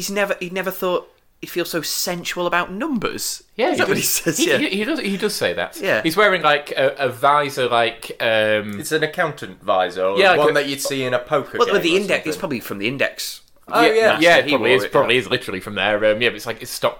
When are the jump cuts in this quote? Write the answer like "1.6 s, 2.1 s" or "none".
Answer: none